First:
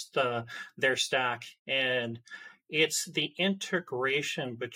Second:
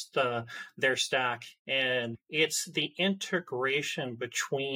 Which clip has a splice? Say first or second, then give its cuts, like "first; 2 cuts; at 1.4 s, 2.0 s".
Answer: second; 1 cut; at 2.2 s